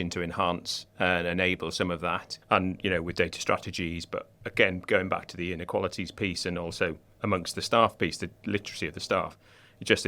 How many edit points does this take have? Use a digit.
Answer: 0